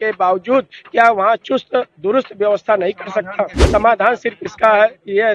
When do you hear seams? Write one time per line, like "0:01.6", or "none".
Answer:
0:03.6